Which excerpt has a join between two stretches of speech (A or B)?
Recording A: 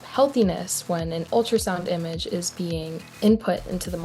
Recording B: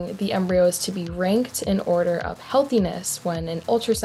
A